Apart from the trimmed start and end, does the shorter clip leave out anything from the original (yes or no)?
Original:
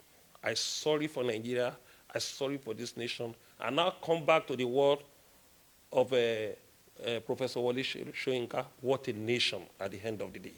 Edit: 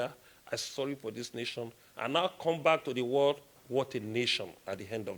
yes